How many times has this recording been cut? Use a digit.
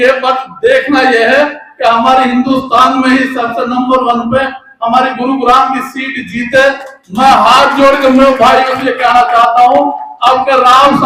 0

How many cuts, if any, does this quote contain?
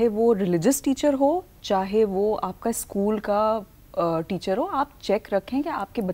0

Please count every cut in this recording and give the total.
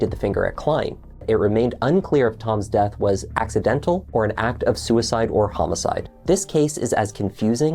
3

